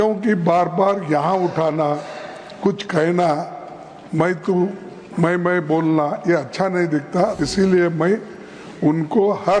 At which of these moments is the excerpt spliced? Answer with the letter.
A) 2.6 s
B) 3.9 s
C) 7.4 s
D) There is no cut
C